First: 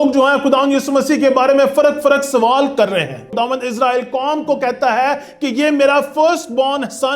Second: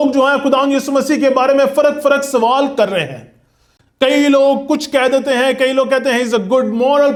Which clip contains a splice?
first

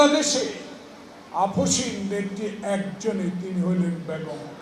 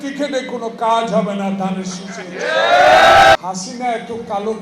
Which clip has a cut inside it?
second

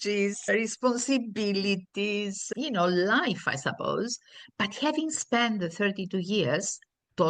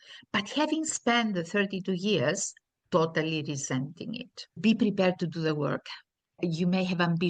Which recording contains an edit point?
second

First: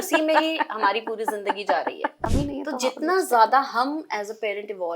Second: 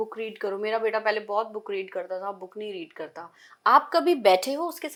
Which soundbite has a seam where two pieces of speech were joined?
first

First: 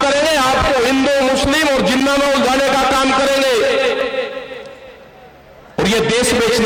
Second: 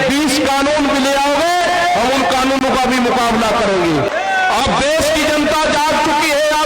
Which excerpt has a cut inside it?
second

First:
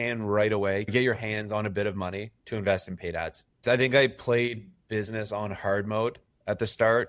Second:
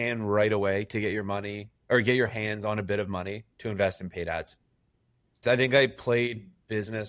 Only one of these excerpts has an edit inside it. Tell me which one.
first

